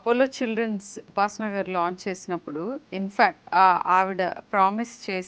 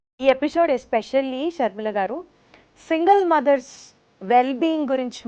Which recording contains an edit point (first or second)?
first